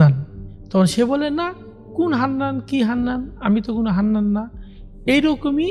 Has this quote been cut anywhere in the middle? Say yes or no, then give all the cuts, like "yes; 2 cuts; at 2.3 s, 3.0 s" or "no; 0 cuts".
no; 0 cuts